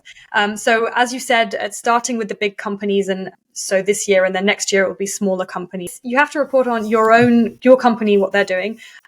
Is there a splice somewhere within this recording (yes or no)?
yes